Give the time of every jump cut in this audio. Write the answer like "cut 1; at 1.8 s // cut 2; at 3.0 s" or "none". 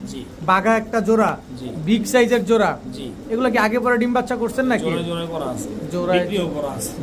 none